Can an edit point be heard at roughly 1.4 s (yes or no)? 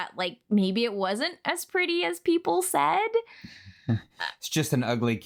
no